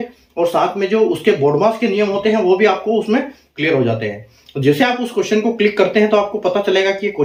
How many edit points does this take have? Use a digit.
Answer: 0